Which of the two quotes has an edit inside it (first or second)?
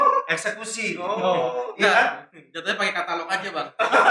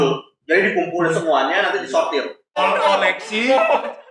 second